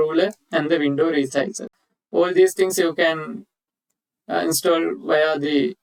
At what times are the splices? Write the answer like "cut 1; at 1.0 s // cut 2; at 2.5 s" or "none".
none